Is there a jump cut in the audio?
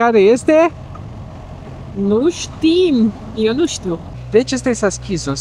yes; 1 cut; at 4.1 s

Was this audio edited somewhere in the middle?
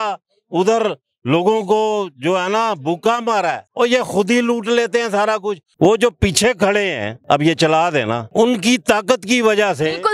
yes; 4 cuts; at 3.6 s, 5.6 s, 7.1 s, 8.2 s

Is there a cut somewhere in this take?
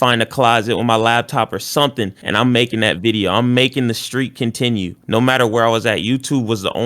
no; 0 cuts

